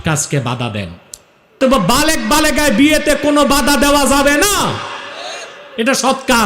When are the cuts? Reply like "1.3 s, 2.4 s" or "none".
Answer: 1.6 s